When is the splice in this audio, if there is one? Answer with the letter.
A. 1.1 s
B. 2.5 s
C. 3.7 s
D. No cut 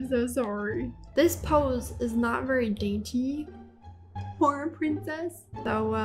A